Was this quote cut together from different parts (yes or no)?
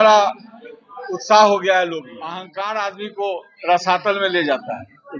yes